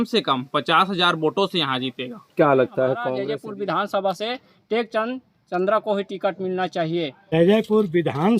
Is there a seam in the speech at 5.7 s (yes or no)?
no